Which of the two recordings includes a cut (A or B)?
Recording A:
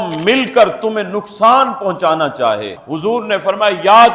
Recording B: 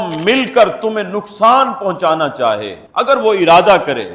A